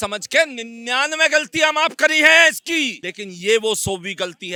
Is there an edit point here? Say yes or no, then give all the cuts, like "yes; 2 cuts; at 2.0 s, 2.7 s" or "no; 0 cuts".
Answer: no; 0 cuts